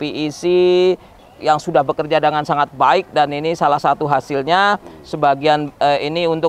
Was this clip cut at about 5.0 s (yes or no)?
no